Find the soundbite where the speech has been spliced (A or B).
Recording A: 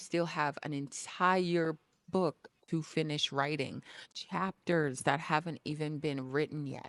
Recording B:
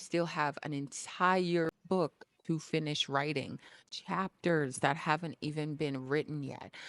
B